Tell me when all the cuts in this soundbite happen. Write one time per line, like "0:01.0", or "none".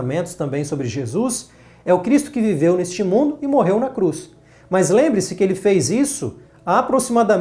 none